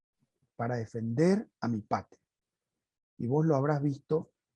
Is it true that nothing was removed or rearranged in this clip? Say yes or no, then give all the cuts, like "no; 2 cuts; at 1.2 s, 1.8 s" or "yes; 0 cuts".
yes; 0 cuts